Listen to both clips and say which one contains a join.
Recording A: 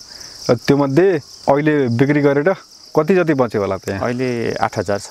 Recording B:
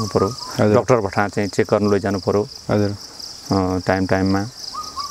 A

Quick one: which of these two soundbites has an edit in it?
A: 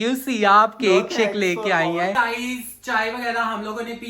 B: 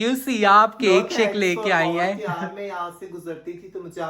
A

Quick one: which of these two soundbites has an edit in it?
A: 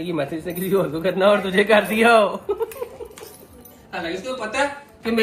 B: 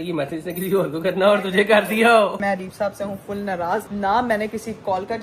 B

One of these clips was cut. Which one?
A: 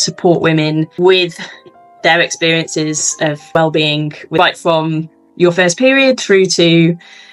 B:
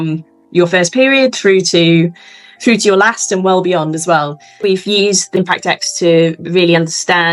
B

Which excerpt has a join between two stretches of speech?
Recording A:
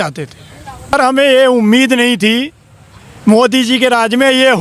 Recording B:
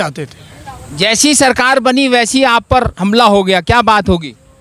A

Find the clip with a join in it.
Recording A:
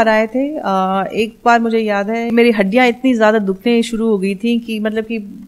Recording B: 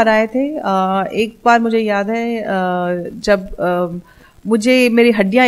A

